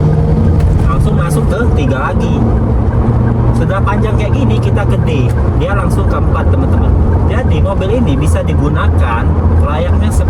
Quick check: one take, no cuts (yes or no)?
yes